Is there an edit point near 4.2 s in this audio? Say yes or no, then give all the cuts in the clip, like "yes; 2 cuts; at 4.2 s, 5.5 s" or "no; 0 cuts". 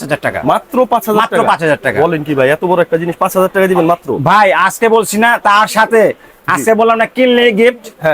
no; 0 cuts